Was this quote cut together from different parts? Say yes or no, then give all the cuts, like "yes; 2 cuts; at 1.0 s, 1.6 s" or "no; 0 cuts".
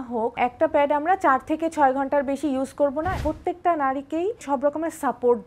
yes; 2 cuts; at 3.1 s, 4.4 s